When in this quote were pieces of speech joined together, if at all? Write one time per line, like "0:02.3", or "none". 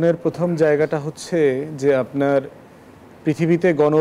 none